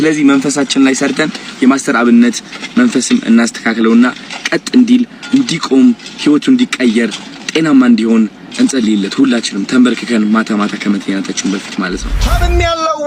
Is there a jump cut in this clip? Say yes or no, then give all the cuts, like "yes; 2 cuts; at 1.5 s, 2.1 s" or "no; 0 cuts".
yes; 1 cut; at 12.2 s